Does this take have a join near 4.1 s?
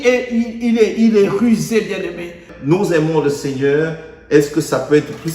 no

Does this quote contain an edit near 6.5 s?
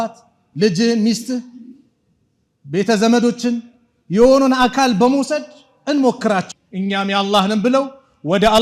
yes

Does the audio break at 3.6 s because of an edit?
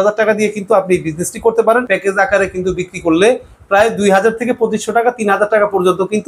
no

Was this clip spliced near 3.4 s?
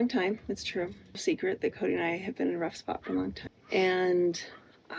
yes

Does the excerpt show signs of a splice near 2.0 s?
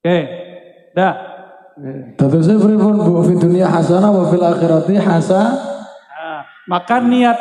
yes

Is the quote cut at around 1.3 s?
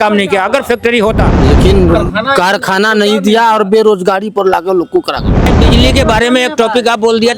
yes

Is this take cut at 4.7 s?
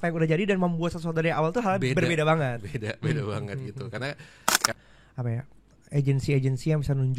yes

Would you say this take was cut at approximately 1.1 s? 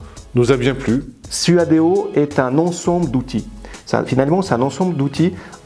yes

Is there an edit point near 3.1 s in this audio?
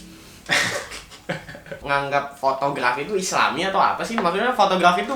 no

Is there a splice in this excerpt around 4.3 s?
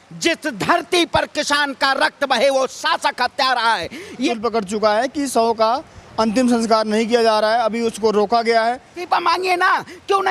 yes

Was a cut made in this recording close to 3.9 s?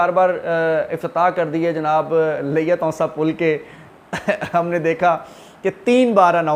no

